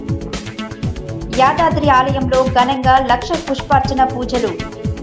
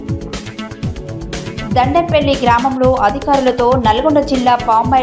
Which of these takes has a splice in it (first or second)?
first